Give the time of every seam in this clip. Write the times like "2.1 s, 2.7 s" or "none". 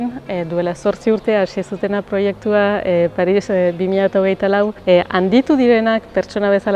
4.8 s